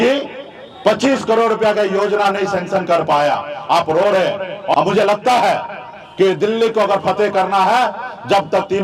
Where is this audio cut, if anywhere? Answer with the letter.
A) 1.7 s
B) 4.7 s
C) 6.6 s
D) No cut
B